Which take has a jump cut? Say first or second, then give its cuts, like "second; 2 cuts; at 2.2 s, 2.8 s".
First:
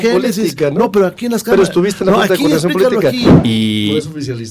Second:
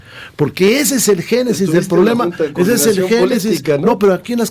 first; 1 cut; at 3.3 s